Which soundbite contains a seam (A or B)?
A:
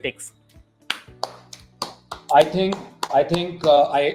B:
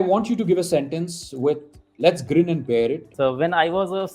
B